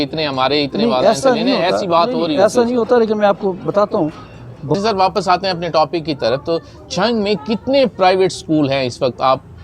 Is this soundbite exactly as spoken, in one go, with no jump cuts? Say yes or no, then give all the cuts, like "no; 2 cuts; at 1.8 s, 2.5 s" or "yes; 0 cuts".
no; 1 cut; at 4.8 s